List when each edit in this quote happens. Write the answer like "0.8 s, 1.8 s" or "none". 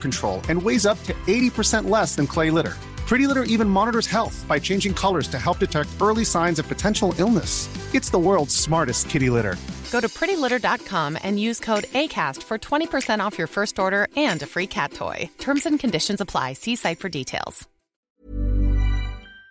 18.1 s